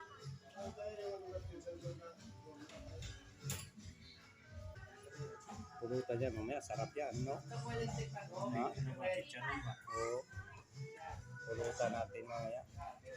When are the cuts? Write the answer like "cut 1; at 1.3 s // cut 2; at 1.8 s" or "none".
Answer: cut 1; at 4.7 s